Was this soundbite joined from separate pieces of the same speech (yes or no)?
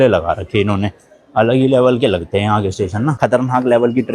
yes